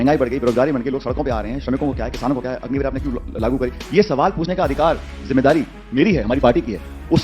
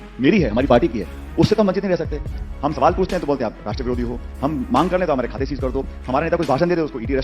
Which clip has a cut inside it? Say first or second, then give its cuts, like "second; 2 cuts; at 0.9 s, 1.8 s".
second; 1 cut; at 2.4 s